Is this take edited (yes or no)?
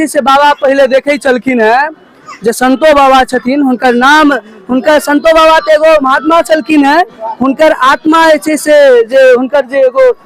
no